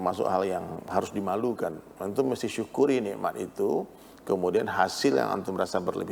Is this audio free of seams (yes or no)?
yes